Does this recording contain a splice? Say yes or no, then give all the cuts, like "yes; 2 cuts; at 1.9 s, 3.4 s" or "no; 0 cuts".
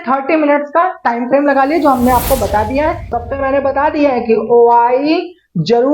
yes; 1 cut; at 3.1 s